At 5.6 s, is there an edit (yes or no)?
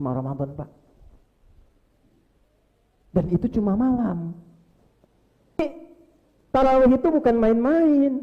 yes